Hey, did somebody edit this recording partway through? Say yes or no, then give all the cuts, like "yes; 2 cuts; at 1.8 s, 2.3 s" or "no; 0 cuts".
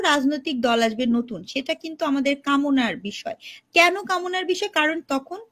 no; 0 cuts